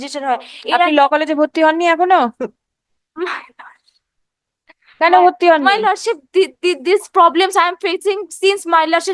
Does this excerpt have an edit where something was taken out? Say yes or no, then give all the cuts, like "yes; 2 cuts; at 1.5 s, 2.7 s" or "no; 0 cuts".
no; 0 cuts